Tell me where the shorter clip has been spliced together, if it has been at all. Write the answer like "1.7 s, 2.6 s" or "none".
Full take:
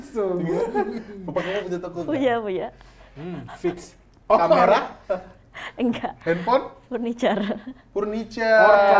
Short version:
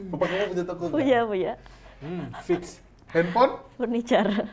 3.0 s

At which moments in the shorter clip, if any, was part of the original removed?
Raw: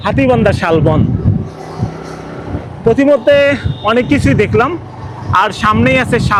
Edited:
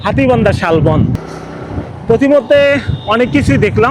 1.2 s

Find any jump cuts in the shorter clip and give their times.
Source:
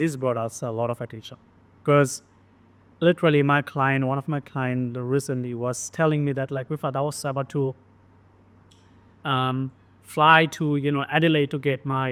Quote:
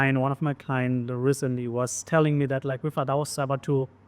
none

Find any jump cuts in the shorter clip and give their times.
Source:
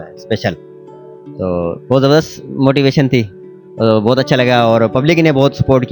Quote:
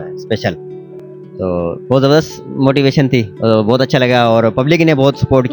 3.3 s

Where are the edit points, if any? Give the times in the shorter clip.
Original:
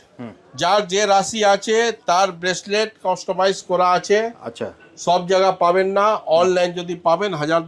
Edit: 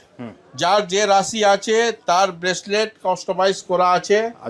none

